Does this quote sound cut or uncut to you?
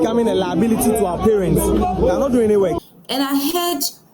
cut